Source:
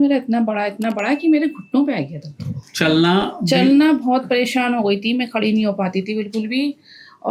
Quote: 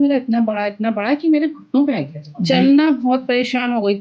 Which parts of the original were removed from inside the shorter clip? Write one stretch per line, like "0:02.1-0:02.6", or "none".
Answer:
0:02.3-0:03.4